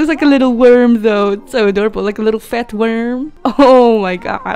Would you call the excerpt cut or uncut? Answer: uncut